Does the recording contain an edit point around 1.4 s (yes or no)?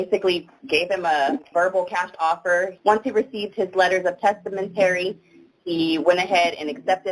no